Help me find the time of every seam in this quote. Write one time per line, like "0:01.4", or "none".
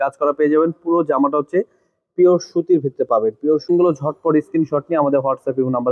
0:03.7